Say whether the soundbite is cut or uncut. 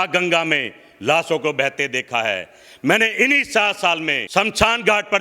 cut